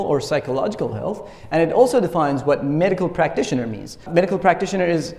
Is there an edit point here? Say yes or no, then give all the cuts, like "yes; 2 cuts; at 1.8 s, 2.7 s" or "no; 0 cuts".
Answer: yes; 1 cut; at 4.0 s